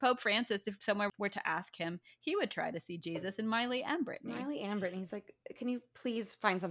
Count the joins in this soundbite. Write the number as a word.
two